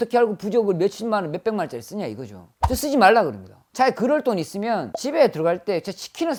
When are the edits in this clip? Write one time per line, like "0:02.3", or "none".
none